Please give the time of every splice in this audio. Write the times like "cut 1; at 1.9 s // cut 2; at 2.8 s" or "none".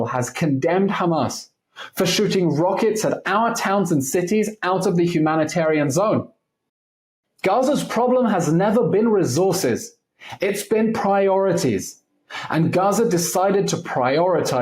cut 1; at 6.9 s